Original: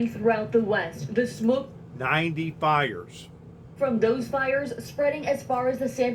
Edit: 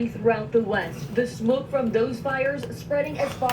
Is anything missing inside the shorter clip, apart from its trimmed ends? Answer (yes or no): yes